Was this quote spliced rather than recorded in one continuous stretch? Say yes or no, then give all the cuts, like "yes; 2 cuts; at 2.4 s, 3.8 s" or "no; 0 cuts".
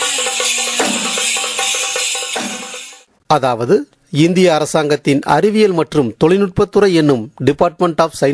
yes; 1 cut; at 3.1 s